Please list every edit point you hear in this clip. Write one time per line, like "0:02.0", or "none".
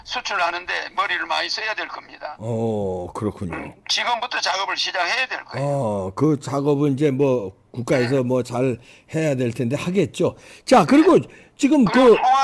none

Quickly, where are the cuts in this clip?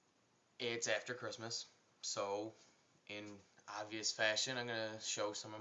0:02.8

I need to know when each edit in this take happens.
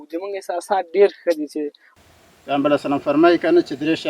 0:01.9

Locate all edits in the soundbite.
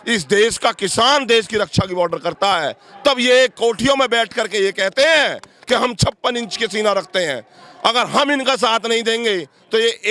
none

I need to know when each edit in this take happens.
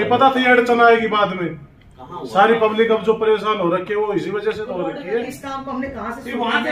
0:05.3

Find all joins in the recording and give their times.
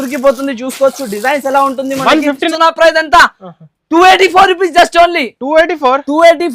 0:02.5

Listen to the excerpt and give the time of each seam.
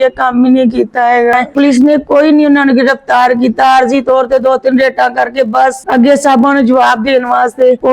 0:01.4

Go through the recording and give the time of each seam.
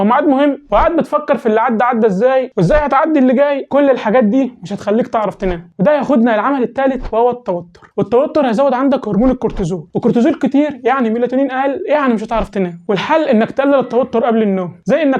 none

